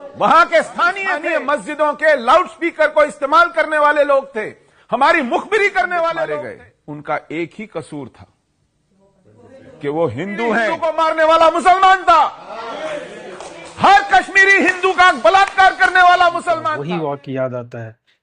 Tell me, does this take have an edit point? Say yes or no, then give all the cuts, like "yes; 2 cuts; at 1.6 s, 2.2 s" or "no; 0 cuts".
yes; 4 cuts; at 1.1 s, 6.3 s, 10.8 s, 16.7 s